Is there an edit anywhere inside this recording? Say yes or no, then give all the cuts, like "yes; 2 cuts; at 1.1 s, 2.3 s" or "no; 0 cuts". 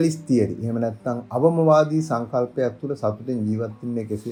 no; 0 cuts